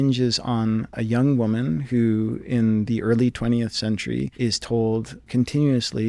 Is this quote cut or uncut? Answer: cut